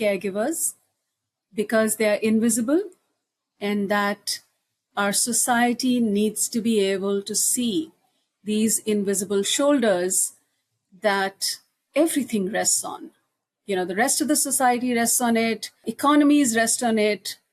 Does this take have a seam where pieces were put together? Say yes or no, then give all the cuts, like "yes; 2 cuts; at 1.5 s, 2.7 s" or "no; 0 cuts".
yes; 1 cut; at 15.9 s